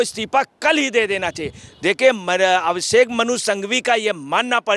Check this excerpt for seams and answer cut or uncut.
uncut